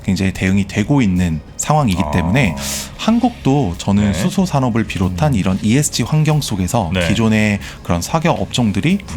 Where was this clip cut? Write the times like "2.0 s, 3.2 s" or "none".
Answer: 1.5 s